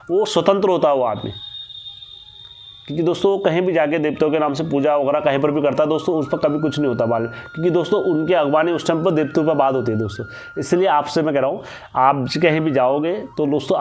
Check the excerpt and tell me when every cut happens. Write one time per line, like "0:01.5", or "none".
none